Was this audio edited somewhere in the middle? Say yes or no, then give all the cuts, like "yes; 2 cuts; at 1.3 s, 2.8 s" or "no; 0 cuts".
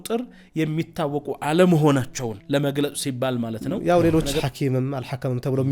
yes; 2 cuts; at 2.4 s, 3.7 s